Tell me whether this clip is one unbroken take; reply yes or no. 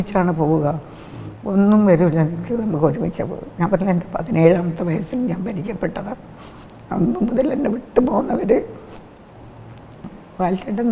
no